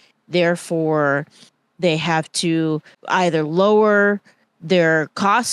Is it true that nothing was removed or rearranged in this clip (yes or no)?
no